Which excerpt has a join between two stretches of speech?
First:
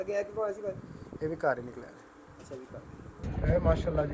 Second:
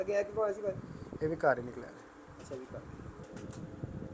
first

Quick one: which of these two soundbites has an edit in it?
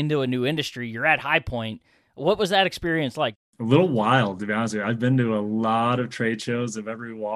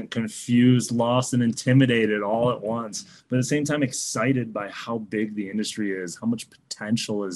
first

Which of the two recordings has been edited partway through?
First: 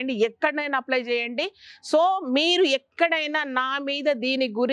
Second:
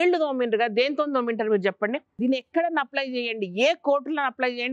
second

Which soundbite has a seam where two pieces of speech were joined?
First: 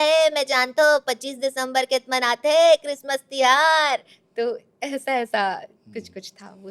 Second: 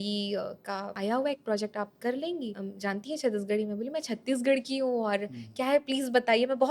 second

